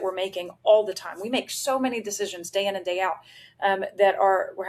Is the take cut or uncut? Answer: uncut